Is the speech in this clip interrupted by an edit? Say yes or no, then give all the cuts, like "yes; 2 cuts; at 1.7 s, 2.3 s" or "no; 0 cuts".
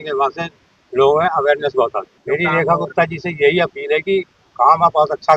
yes; 1 cut; at 2.1 s